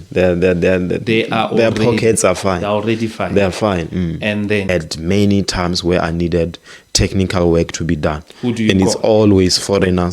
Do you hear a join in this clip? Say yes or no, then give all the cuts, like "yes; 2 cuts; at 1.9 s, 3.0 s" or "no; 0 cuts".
yes; 1 cut; at 4.7 s